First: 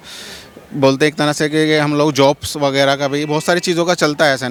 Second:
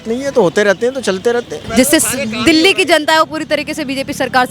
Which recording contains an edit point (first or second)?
second